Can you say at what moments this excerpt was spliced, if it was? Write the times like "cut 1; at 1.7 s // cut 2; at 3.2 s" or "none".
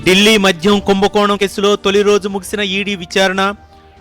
cut 1; at 1.4 s